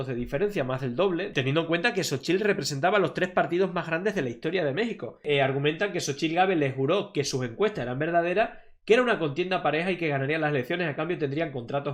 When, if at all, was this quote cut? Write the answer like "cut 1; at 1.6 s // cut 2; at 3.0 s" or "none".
cut 1; at 1.3 s // cut 2; at 5.2 s